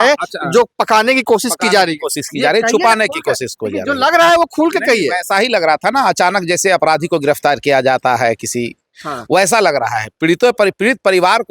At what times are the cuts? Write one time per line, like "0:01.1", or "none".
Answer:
none